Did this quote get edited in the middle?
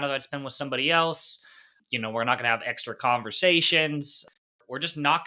yes; 2 cuts; at 1.7 s, 4.4 s

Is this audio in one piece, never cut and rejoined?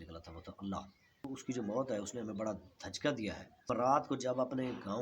no; 2 cuts; at 1.3 s, 3.7 s

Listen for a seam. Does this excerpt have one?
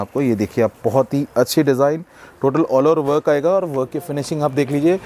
no; 0 cuts

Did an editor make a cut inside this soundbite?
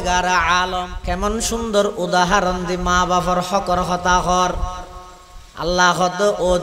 yes; 1 cut; at 0.9 s

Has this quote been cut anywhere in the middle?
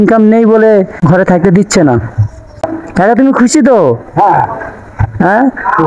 yes; 2 cuts; at 0.9 s, 2.8 s

